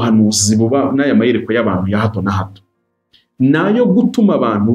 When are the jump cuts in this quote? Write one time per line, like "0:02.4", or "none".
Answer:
none